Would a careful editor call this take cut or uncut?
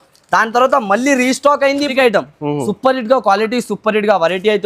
cut